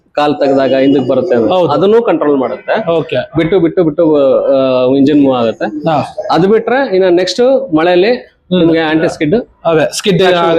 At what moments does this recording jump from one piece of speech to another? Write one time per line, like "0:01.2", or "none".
none